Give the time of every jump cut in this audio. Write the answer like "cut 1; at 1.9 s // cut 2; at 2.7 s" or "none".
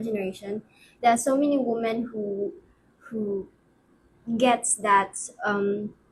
none